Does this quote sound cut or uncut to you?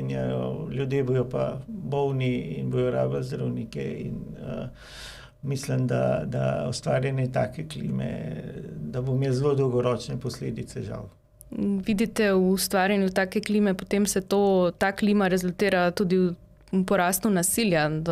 uncut